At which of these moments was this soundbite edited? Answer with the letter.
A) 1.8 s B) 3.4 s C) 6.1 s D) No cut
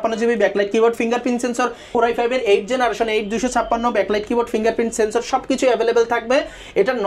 A